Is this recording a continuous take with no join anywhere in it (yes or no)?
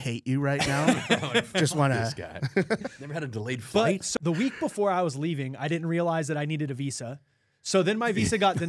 no